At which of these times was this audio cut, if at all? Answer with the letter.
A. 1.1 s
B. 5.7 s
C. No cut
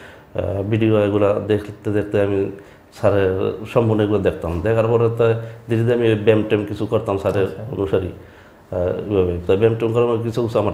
C